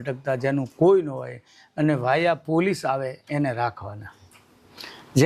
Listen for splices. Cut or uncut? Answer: uncut